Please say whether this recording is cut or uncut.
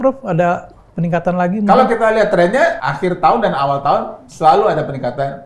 cut